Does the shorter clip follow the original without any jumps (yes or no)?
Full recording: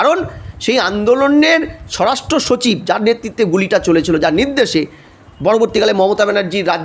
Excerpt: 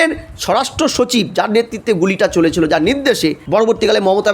no